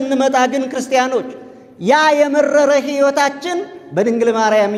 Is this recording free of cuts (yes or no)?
yes